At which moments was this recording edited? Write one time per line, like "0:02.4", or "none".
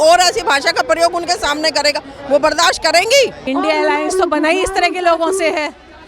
0:03.4